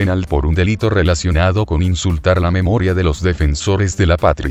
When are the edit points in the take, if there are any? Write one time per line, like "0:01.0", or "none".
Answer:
none